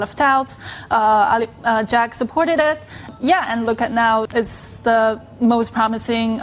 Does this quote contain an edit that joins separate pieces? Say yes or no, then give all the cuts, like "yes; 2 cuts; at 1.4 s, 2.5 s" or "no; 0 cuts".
yes; 2 cuts; at 3.1 s, 4.3 s